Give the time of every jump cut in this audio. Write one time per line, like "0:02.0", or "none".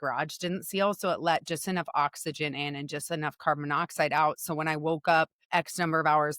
0:05.4